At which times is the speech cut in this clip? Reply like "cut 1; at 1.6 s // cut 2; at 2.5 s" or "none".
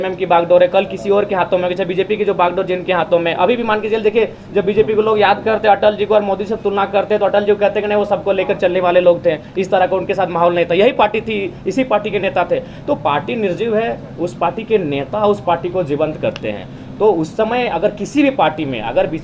none

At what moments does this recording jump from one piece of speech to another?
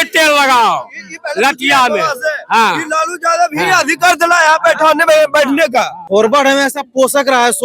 cut 1; at 6.0 s

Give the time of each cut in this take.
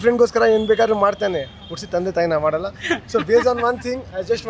none

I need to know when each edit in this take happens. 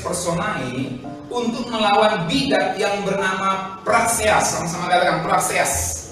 none

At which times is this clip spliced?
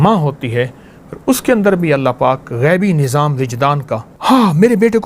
cut 1; at 4.1 s

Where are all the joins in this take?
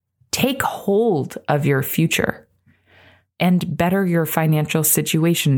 none

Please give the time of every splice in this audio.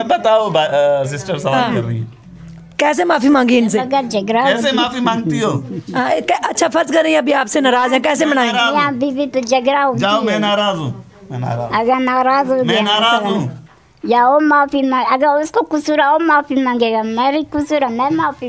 none

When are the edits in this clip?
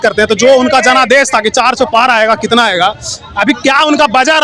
none

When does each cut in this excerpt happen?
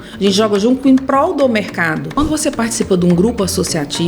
cut 1; at 2.2 s

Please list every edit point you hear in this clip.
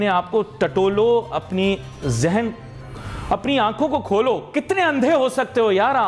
none

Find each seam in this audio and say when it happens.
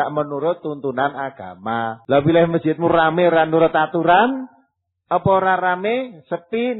cut 1; at 2.0 s

